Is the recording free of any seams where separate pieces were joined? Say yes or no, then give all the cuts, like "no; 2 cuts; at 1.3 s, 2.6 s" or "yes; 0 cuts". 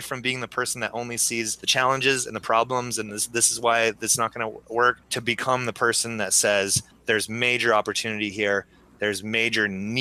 no; 3 cuts; at 1.6 s, 5.1 s, 6.9 s